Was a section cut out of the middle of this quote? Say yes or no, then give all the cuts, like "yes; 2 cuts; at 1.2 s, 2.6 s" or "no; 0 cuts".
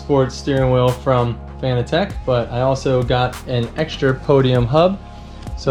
no; 0 cuts